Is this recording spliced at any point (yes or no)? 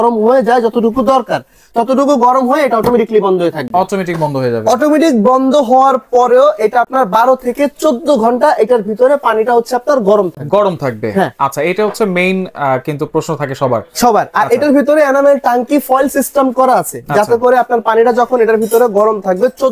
no